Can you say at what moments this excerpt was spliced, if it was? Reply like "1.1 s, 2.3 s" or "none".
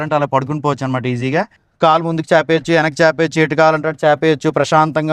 none